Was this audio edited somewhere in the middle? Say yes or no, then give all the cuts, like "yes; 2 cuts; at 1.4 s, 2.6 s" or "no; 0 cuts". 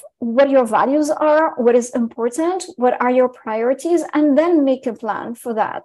no; 0 cuts